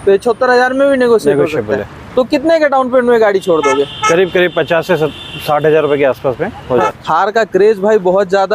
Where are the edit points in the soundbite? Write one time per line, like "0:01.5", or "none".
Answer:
0:07.0